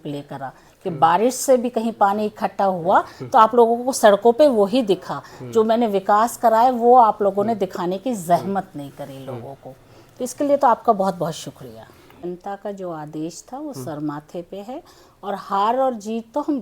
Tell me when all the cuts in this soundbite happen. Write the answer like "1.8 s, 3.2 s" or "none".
12.2 s